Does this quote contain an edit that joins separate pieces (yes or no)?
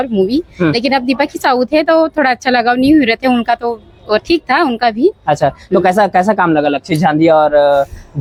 no